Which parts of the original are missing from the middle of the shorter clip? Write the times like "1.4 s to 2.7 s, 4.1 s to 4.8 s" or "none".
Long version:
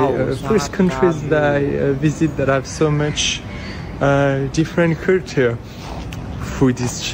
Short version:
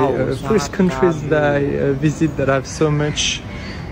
none